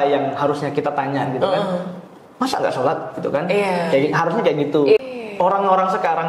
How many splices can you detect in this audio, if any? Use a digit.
1